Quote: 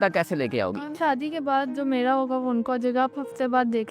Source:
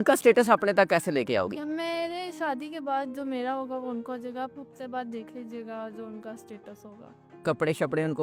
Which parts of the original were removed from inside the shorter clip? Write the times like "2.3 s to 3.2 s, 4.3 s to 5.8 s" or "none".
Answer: 1.7 s to 2.3 s